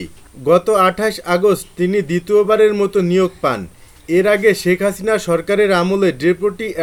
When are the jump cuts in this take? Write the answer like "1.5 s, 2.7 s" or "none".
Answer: none